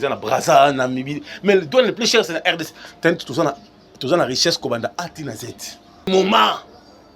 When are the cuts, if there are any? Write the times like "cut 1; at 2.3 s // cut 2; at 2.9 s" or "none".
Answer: cut 1; at 6.1 s